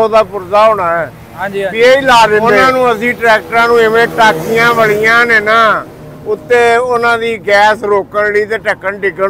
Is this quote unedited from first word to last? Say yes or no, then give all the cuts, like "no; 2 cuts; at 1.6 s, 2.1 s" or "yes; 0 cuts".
no; 1 cut; at 2.6 s